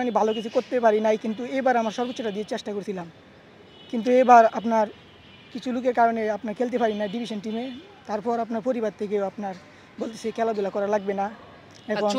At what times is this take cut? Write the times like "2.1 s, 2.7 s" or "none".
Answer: none